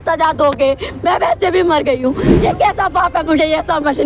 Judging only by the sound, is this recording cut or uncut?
cut